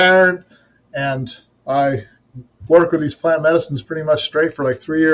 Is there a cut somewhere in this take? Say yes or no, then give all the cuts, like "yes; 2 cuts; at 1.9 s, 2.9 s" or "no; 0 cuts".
no; 0 cuts